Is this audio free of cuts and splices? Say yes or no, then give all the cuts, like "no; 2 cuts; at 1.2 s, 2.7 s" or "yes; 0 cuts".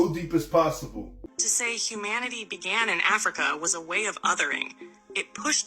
no; 1 cut; at 1.2 s